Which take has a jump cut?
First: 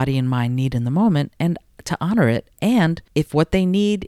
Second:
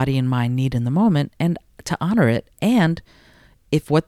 first; 1 cut; at 3.0 s

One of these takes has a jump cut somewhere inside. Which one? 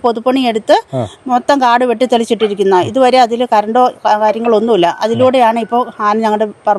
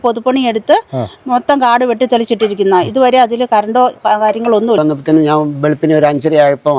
second; 1 cut; at 4.8 s

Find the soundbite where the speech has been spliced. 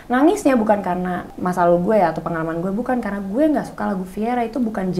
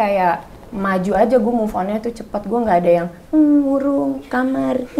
first; 1 cut; at 1.2 s

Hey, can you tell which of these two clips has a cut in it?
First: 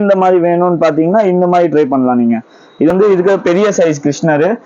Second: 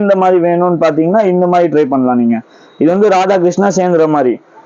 first; 1 cut; at 2.9 s

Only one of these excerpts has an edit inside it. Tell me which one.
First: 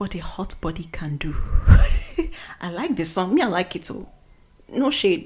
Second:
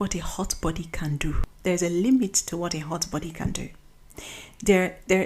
second; 1 cut; at 1.5 s

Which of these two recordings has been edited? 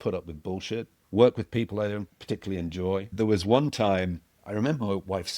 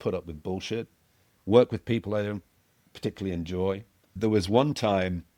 first; 4 cuts; at 1.0 s, 2.1 s, 3.1 s, 4.3 s

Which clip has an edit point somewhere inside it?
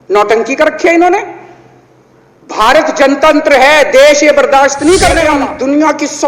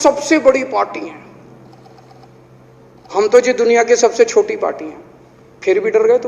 first; 1 cut; at 5.2 s

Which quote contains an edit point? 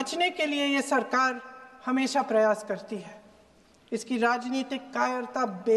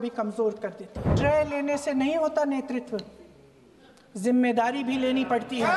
second; 1 cut; at 1.1 s

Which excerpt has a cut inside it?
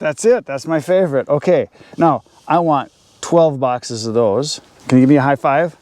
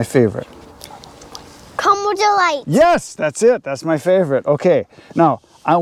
first; 1 cut; at 4.8 s

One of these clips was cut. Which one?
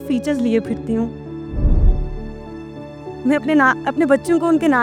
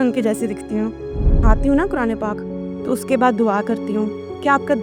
second; 1 cut; at 1.4 s

